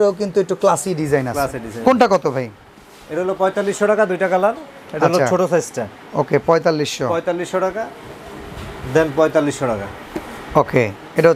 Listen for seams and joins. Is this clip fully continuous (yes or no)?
yes